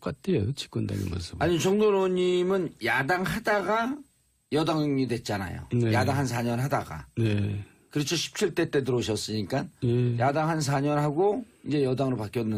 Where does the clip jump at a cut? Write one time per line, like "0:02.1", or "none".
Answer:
none